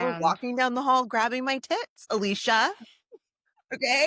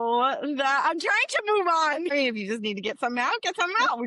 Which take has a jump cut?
second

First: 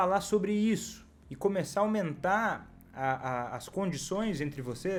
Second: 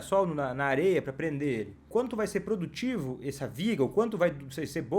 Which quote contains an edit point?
second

